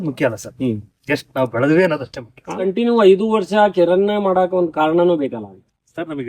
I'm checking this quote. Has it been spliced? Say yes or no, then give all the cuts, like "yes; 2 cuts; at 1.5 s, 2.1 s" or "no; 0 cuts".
yes; 1 cut; at 2.6 s